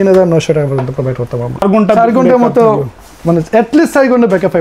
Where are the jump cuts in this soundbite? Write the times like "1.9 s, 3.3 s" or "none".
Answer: 1.6 s